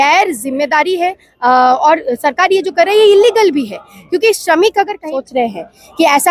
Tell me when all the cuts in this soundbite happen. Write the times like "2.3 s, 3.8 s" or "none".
5.1 s